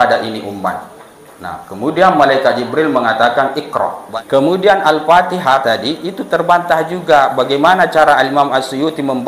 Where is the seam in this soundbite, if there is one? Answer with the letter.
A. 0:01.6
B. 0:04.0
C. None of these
B